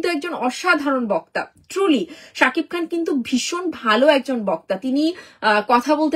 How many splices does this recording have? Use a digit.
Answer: 1